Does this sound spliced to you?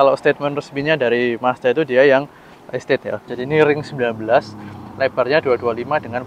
yes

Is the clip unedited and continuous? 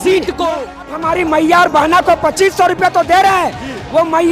no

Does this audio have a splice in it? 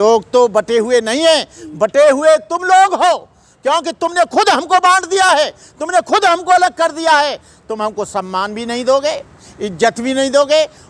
no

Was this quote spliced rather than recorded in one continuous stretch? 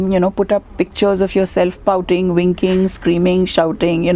no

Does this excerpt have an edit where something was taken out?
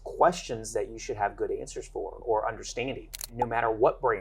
yes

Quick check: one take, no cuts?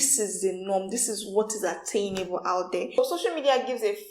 no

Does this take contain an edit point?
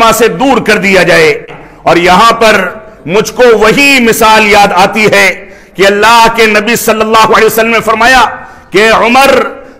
yes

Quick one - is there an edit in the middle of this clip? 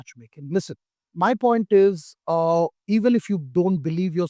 yes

